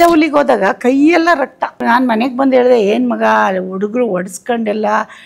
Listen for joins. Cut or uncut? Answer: cut